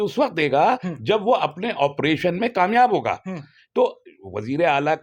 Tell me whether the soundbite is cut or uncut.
uncut